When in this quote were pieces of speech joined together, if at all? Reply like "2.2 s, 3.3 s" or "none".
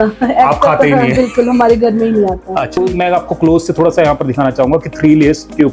2.7 s